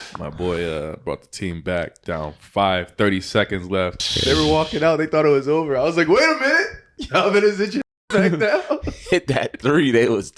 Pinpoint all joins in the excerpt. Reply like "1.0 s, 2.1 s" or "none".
4.1 s